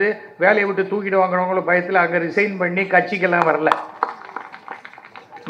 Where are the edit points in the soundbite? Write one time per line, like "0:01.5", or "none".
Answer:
none